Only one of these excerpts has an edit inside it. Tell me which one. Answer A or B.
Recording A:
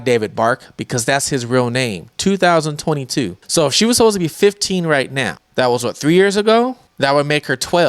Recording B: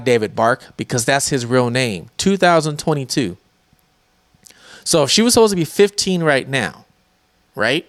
A